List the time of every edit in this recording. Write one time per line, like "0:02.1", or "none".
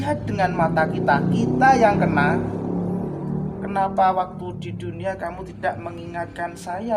none